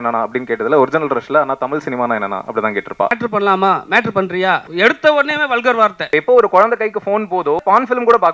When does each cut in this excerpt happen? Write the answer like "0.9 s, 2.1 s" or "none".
3.2 s, 4.7 s, 6.1 s, 7.6 s